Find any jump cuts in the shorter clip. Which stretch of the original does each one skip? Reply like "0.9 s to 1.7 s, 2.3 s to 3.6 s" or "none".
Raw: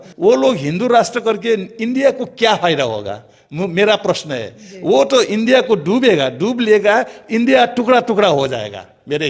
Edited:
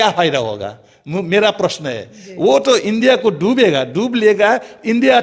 none